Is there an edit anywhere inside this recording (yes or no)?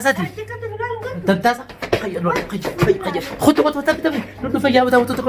no